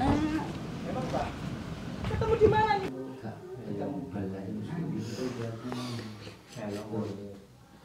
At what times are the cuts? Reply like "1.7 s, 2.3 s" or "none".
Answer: 2.9 s